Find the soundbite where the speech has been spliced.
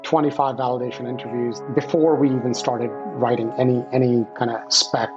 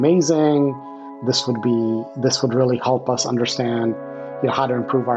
first; 1 cut; at 1.6 s

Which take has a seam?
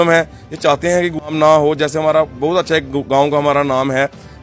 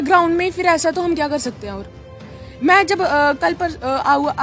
first; 1 cut; at 1.3 s

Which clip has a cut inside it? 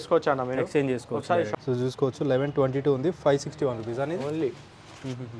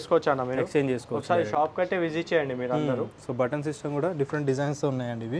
first; 1 cut; at 1.5 s

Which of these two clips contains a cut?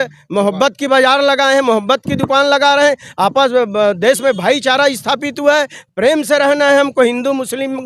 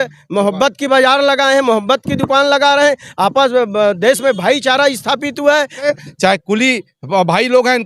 second; 1 cut; at 5.9 s

